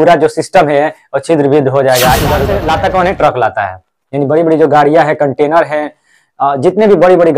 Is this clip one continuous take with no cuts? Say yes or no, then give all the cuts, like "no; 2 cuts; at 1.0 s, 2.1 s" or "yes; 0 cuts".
no; 1 cut; at 2.5 s